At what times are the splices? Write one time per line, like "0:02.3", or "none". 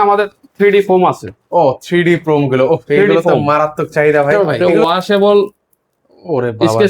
0:04.3